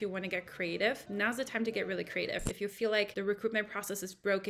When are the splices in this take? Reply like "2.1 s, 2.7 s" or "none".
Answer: 1.0 s, 3.1 s